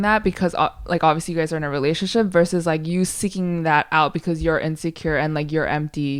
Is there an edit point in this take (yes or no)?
no